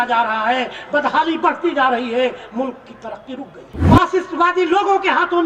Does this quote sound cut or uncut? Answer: cut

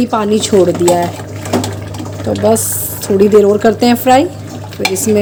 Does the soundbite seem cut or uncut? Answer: uncut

